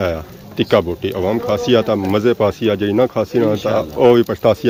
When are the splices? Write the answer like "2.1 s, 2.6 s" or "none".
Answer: none